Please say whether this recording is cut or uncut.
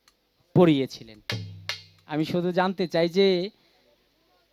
uncut